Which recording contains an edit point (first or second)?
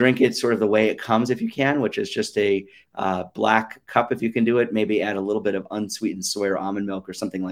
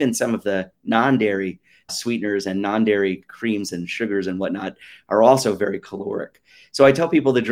second